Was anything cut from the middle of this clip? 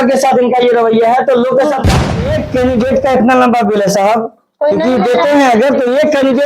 yes; 1 cut; at 2.1 s

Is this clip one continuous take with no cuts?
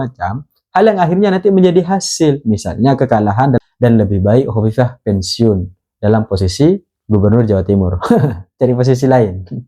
no; 1 cut; at 3.6 s

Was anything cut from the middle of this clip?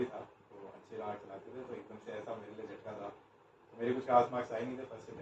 no; 0 cuts

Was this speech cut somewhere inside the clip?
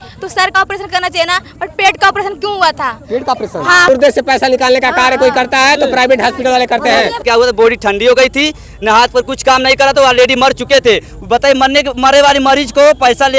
yes; 2 cuts; at 3.9 s, 7.3 s

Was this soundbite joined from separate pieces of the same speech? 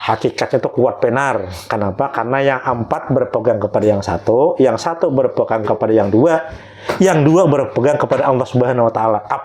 no; 0 cuts

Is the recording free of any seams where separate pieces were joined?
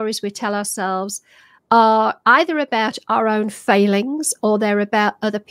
yes; 0 cuts

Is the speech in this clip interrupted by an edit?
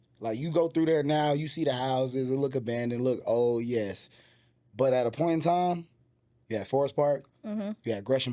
no; 0 cuts

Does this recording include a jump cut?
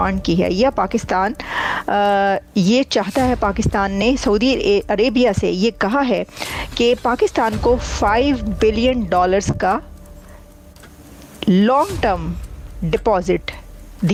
no; 0 cuts

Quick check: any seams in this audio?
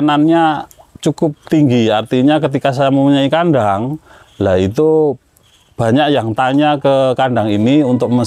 no; 0 cuts

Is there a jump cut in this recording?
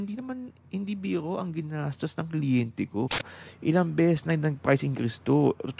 yes; 1 cut; at 3.4 s

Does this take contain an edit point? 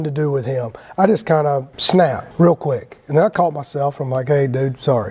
yes; 1 cut; at 2.2 s

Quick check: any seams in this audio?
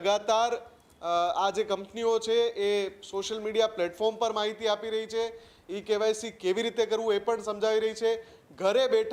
no; 0 cuts

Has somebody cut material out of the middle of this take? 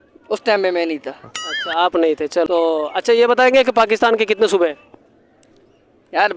yes; 1 cut; at 2.5 s

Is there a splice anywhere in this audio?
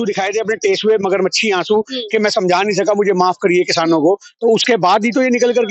no; 0 cuts

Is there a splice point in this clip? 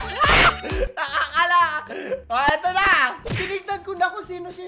yes; 1 cut; at 2.2 s

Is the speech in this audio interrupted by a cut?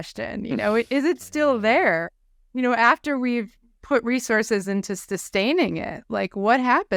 no; 0 cuts

